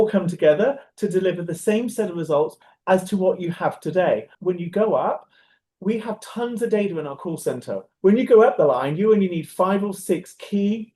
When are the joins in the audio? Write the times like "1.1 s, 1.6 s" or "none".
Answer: 2.6 s, 4.3 s, 7.9 s